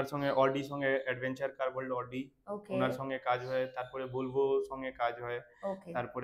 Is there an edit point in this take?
no; 0 cuts

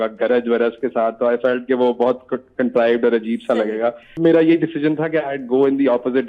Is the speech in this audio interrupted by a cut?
yes; 1 cut; at 4.1 s

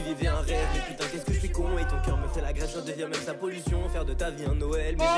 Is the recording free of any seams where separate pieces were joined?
yes; 0 cuts

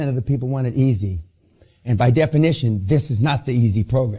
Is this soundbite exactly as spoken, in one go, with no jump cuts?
yes; 0 cuts

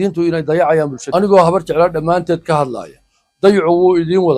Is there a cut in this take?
yes; 1 cut; at 1.0 s

